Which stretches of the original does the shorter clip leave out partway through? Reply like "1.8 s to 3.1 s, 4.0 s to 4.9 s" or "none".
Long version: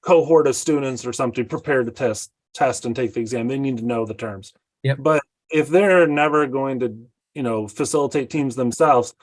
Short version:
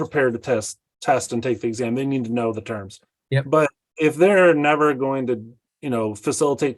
none

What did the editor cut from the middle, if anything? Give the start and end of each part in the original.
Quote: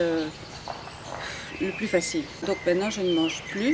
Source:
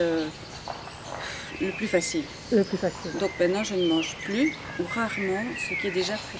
2.3 s to 3.1 s

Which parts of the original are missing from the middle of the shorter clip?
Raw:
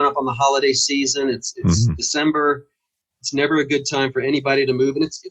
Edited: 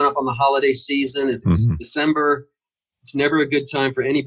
1.4 s to 1.6 s

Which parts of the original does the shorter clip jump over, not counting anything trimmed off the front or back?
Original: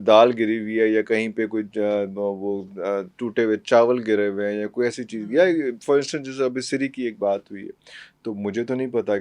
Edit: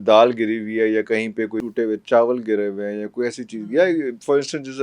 1.6 s to 3.2 s

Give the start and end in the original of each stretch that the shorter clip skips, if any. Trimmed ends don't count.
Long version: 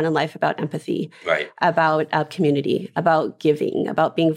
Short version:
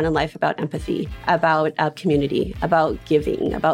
1.1 s to 1.5 s

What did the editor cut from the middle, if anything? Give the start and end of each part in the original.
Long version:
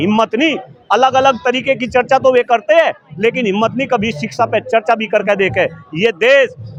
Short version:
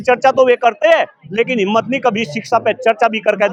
none

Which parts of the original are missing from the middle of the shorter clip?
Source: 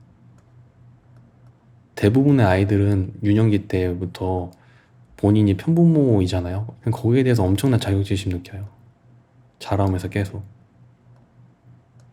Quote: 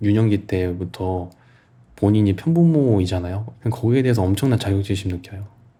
none

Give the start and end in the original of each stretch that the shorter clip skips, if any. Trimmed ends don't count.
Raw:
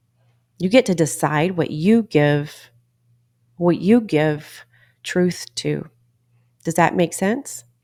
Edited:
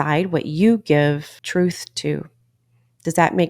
2.6 s to 4.9 s

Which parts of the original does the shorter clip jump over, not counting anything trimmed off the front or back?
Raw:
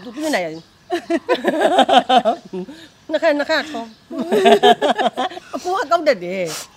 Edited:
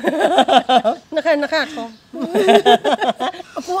2.4 s to 3.0 s

